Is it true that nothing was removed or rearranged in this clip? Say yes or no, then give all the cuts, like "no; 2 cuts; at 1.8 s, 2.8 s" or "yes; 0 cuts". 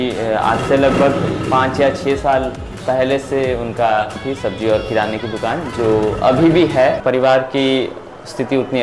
no; 2 cuts; at 4.2 s, 7.0 s